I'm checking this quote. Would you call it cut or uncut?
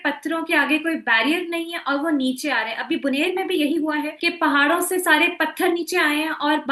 cut